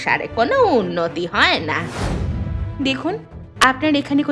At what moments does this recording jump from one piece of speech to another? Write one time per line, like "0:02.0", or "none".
0:02.6